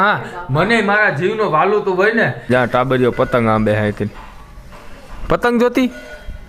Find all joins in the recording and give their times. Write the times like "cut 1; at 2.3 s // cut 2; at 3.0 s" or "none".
cut 1; at 2.5 s